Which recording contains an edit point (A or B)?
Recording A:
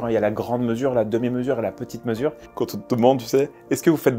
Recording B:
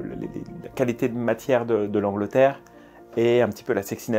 A